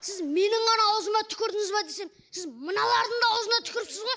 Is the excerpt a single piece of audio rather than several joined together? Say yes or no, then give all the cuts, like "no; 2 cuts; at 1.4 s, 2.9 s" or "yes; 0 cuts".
yes; 0 cuts